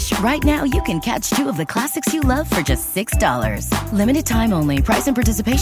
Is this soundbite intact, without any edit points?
yes; 0 cuts

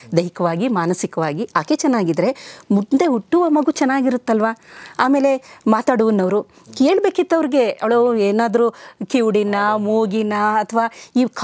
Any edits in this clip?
no; 0 cuts

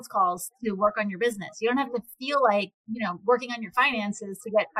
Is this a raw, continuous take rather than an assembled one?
no; 1 cut; at 2.8 s

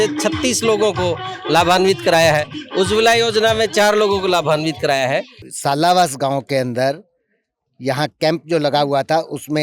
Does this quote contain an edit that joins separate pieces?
yes; 1 cut; at 5.4 s

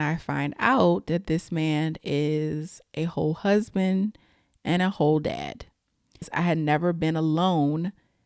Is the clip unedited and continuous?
no; 1 cut; at 6.3 s

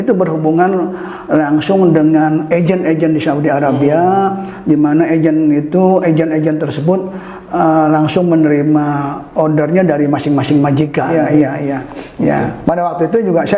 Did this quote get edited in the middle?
yes; 1 cut; at 11.1 s

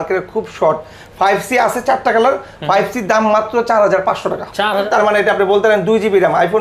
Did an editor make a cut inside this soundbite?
yes; 1 cut; at 4.8 s

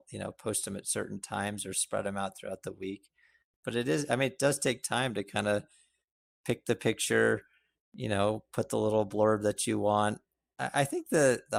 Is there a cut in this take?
no; 0 cuts

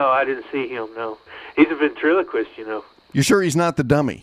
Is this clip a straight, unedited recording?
no; 2 cuts; at 1.3 s, 2.9 s

